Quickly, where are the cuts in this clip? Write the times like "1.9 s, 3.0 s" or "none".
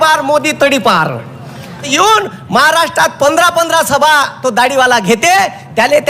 1.9 s